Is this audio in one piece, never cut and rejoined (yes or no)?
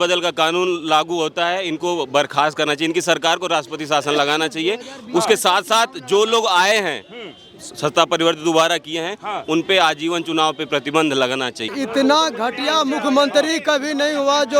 no